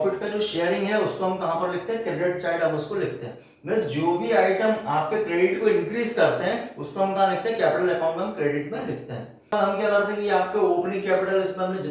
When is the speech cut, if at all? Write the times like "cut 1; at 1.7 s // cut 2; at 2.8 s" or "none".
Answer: cut 1; at 9.5 s

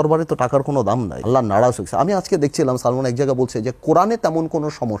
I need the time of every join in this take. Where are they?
cut 1; at 1.1 s

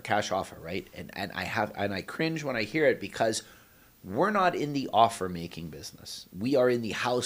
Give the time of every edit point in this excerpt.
none

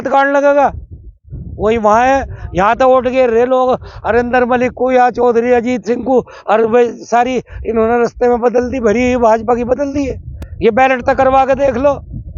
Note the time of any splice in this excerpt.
none

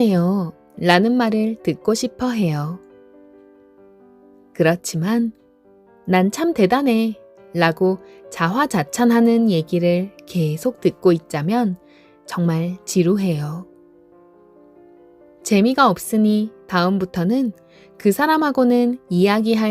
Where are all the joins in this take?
cut 1; at 2.9 s // cut 2; at 4.5 s // cut 3; at 13.6 s // cut 4; at 15.5 s

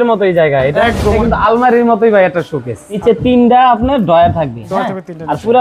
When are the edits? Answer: cut 1; at 1.0 s // cut 2; at 3.0 s

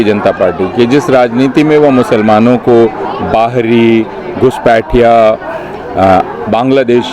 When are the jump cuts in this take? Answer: none

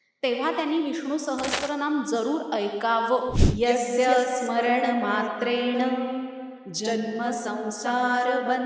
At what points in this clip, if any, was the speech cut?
cut 1; at 3.4 s

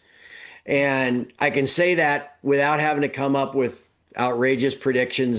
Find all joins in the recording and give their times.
none

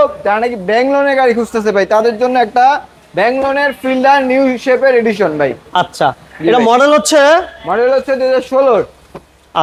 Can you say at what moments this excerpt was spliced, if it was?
none

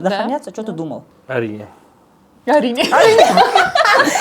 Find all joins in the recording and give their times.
cut 1; at 1.1 s

